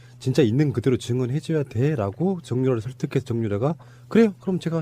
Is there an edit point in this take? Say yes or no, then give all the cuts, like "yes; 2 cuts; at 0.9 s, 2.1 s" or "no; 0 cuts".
no; 0 cuts